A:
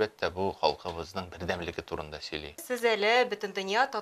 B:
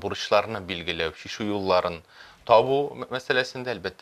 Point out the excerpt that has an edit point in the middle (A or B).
A